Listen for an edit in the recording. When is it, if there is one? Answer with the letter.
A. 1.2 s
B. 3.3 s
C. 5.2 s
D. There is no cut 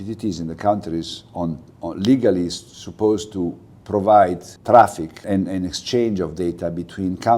C